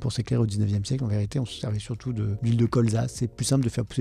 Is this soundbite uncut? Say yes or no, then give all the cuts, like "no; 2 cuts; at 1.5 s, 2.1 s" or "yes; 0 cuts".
no; 1 cut; at 1.7 s